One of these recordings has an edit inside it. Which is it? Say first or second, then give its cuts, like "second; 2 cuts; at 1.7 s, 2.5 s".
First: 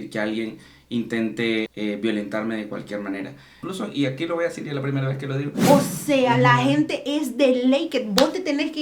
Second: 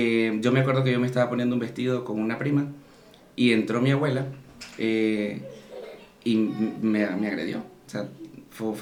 first; 3 cuts; at 1.7 s, 3.7 s, 5.5 s